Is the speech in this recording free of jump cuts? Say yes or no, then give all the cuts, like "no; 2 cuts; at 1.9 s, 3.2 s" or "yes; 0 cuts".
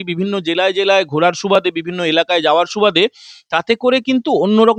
yes; 0 cuts